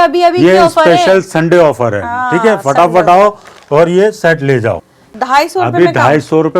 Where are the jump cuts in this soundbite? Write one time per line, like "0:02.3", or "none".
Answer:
0:05.0